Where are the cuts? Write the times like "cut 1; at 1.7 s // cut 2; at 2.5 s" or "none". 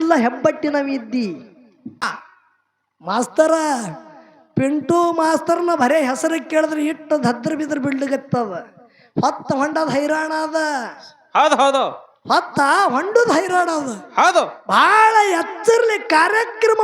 cut 1; at 2.1 s